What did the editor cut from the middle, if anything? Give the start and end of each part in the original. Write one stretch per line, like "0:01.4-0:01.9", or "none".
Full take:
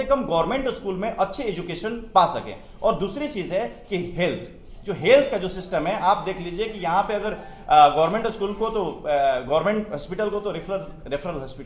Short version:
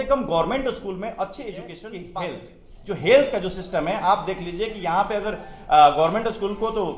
0:02.1-0:04.0